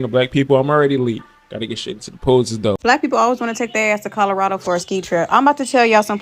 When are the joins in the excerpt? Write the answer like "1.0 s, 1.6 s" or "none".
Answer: 2.8 s